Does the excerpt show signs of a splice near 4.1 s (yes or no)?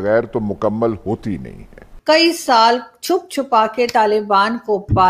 no